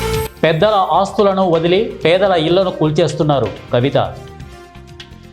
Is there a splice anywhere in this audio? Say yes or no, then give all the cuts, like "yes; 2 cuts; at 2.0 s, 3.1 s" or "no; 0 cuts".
yes; 1 cut; at 4.2 s